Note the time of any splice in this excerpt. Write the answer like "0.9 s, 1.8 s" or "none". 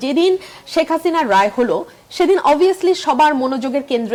none